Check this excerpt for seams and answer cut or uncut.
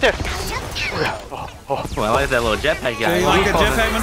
cut